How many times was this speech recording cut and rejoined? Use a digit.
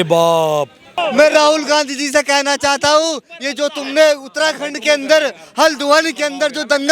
1